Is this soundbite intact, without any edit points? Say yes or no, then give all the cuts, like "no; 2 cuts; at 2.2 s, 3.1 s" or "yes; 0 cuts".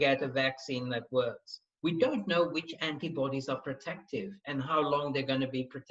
no; 1 cut; at 1.6 s